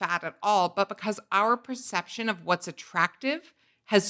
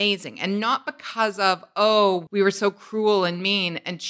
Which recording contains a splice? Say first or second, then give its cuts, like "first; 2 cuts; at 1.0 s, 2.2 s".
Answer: second; 1 cut; at 2.2 s